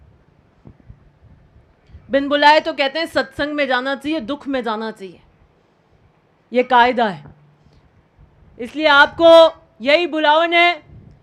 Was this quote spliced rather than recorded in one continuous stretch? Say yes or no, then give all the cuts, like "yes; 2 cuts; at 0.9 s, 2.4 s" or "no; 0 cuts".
no; 0 cuts